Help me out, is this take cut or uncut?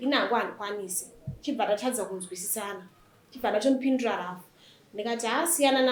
uncut